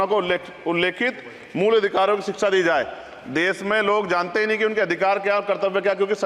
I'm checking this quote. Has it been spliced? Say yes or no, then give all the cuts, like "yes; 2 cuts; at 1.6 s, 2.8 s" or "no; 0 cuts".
no; 0 cuts